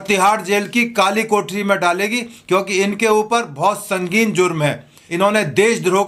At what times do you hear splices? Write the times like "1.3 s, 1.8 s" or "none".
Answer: 5.0 s